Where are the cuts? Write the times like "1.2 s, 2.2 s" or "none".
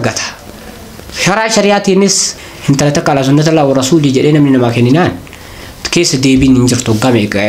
2.8 s